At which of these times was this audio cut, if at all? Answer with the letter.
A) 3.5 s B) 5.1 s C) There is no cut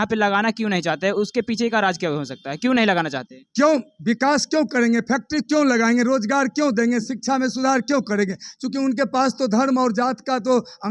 C